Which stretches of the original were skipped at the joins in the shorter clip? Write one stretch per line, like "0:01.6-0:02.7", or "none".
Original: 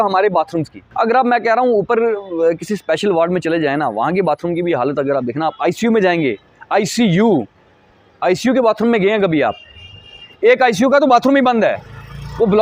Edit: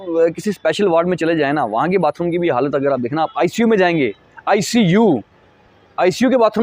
none